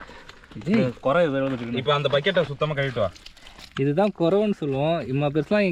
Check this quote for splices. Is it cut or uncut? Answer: uncut